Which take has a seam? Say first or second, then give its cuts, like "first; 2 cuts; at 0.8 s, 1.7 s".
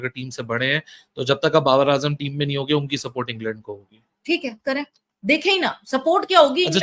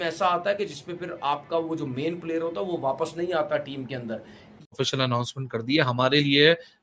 second; 1 cut; at 4.7 s